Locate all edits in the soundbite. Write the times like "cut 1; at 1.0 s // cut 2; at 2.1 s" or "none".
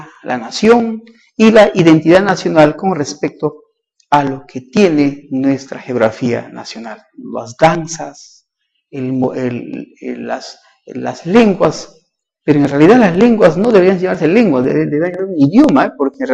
cut 1; at 9.9 s